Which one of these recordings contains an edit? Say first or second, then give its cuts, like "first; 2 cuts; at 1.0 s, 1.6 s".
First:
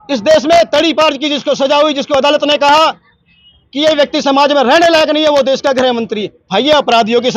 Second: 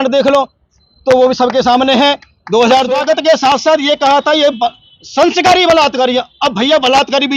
second; 1 cut; at 3.0 s